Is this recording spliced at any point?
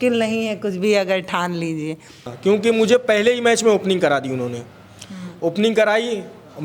yes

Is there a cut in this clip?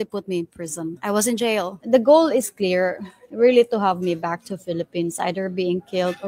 yes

